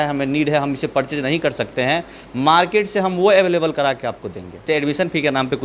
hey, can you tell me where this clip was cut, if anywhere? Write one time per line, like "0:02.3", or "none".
0:04.6